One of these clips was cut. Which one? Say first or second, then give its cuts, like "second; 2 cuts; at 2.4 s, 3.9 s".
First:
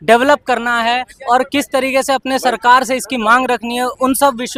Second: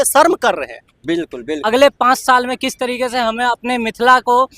second; 1 cut; at 1.6 s